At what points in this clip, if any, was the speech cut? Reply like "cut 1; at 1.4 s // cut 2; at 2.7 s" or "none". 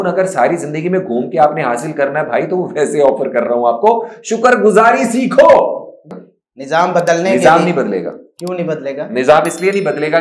cut 1; at 6.0 s

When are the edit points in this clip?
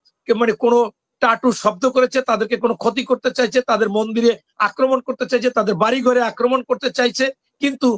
none

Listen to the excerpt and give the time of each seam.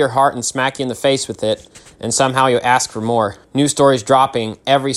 cut 1; at 3.4 s

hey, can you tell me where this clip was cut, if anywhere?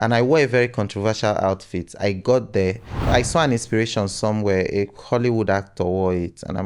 cut 1; at 3.1 s

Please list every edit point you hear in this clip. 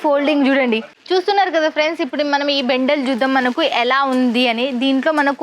cut 1; at 1.0 s

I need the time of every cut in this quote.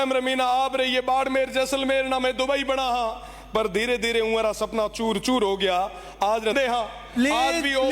cut 1; at 6.5 s

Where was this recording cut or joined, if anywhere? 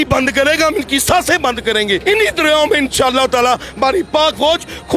cut 1; at 2.0 s

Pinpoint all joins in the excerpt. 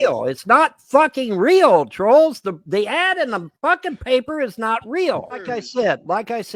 none

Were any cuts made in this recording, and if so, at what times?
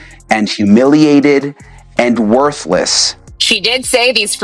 cut 1; at 3.2 s

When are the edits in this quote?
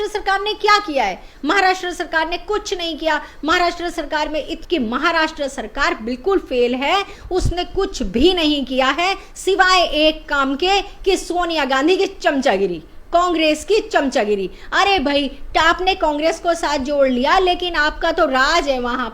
cut 1; at 4.6 s

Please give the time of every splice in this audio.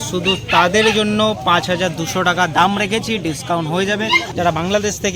cut 1; at 4.3 s

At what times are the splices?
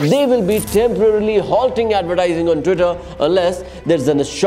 none

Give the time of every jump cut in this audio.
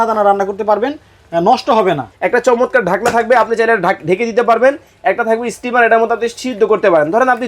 cut 1; at 2.1 s

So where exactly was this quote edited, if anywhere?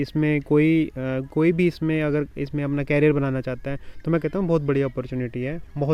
none

